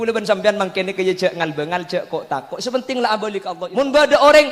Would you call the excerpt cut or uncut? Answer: cut